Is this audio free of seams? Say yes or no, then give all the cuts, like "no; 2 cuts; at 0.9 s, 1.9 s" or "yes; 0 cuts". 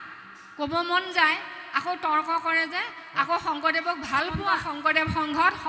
no; 1 cut; at 4.7 s